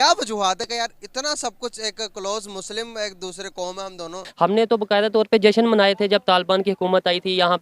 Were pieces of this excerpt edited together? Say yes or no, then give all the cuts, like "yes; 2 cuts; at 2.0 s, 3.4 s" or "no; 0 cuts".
yes; 1 cut; at 4.3 s